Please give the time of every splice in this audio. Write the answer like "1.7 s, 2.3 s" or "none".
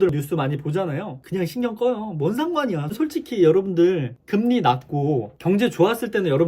1.2 s